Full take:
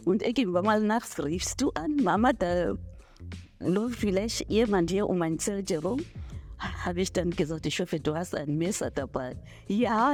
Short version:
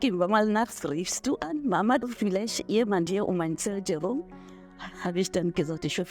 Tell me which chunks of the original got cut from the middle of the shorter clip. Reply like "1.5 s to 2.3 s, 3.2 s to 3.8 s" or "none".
2.4 s to 3.8 s

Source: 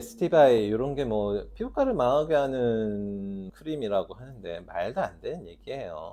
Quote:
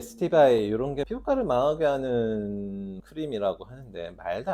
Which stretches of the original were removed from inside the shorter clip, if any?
1.0 s to 1.5 s

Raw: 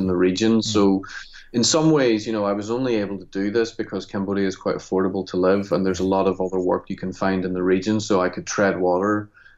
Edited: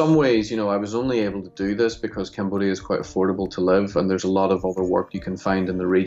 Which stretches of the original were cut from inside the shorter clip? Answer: none

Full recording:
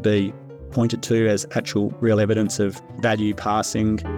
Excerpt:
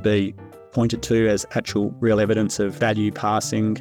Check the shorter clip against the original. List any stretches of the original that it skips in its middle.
2.7 s to 3.0 s

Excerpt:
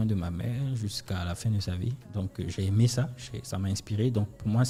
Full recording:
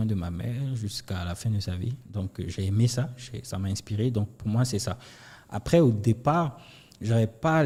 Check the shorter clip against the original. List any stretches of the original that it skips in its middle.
none

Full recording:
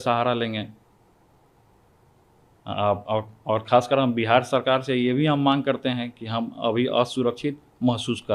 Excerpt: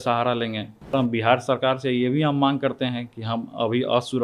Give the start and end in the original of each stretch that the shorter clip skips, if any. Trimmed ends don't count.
0.9 s to 4.0 s

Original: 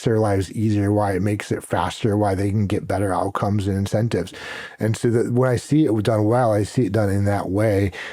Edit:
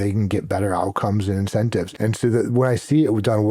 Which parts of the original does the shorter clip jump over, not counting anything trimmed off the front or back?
4.3 s to 4.7 s

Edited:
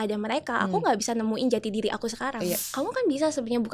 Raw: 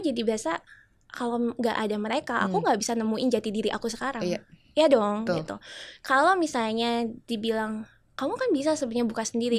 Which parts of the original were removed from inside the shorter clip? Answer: 4.5 s to 8.1 s

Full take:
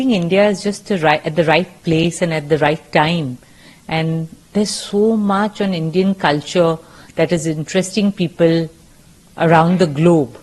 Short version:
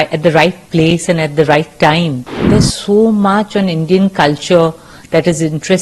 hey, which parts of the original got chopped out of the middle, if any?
3.5 s to 4.4 s

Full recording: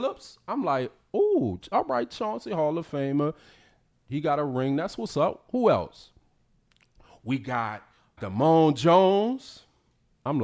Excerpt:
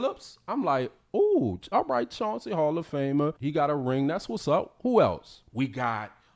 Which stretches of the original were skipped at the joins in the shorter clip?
3.4 s to 4.1 s, 6.0 s to 7.1 s

